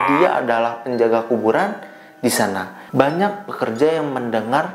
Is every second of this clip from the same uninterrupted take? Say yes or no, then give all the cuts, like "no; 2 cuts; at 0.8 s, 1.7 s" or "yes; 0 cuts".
no; 1 cut; at 2.8 s